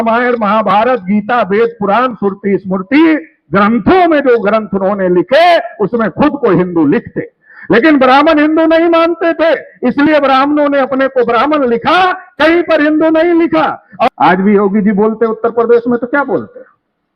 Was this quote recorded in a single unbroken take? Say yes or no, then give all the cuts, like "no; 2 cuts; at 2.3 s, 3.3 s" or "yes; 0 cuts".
no; 1 cut; at 14.1 s